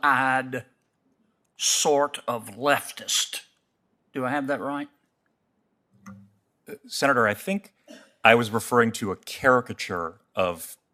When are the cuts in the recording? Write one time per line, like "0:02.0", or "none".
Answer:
none